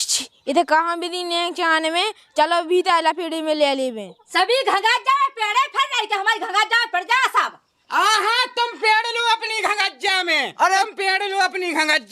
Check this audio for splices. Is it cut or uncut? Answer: cut